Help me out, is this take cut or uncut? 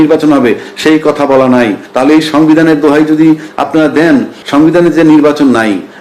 cut